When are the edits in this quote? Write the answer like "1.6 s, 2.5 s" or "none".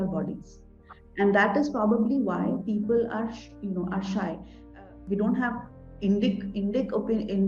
4.8 s